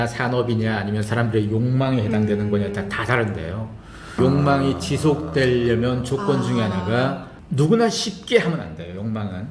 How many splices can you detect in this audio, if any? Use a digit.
1